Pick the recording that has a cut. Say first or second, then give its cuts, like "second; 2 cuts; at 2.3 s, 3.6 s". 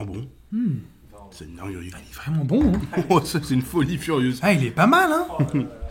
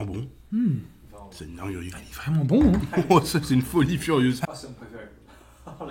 second; 1 cut; at 4.4 s